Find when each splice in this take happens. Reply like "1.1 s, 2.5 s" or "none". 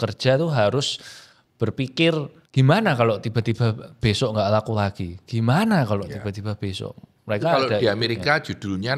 2.4 s